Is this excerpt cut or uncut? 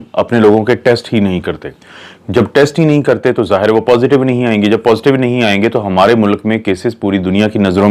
uncut